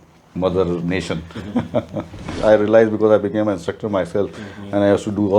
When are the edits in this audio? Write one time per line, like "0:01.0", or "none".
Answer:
0:02.3